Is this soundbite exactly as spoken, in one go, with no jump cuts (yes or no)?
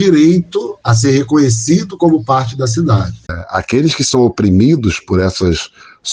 no